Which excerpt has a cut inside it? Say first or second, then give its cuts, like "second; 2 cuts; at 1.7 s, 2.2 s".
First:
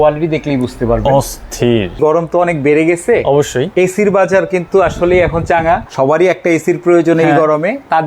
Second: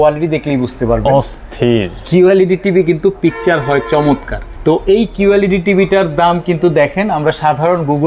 first; 2 cuts; at 2.0 s, 5.9 s